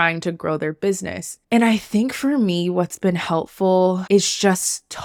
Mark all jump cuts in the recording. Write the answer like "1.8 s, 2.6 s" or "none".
none